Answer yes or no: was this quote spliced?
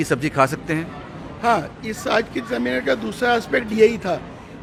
no